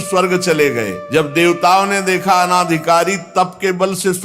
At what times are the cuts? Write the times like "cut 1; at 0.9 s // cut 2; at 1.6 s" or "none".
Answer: cut 1; at 1.0 s